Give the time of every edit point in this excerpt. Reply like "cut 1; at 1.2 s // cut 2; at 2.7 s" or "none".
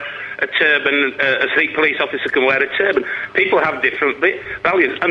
cut 1; at 2.3 s